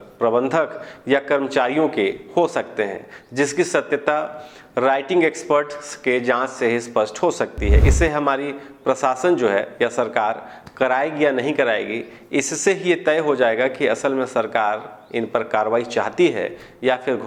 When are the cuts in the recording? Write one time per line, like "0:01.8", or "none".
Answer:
none

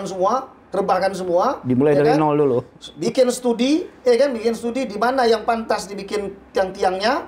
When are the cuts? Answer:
none

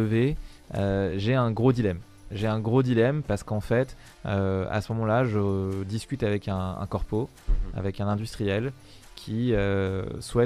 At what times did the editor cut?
none

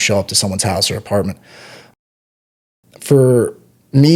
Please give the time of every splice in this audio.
none

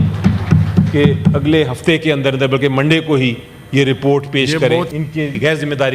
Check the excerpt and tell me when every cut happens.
0:05.0

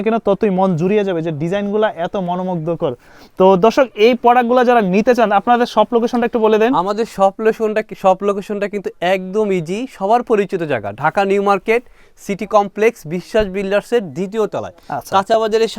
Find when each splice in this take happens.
none

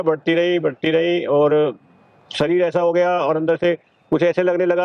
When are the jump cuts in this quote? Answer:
none

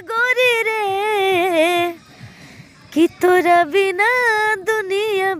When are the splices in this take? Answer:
none

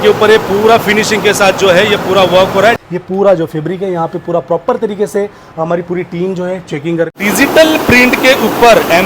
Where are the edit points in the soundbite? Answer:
0:02.8
0:07.2

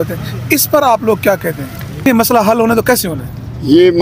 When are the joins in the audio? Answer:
0:02.1

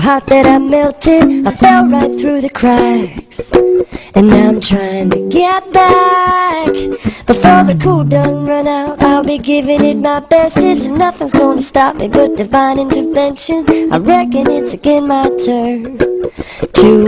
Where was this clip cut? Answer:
none

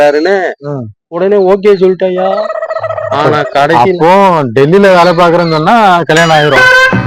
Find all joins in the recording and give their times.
none

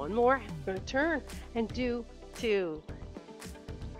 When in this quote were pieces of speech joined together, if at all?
0:02.8

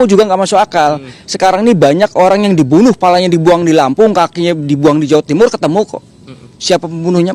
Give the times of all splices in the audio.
none

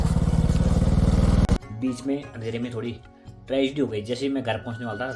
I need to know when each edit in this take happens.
0:01.5

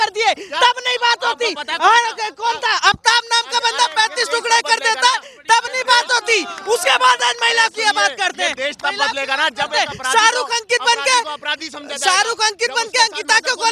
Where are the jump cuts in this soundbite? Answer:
none

